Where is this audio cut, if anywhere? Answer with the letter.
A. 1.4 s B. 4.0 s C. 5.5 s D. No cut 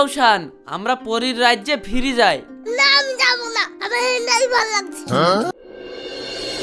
C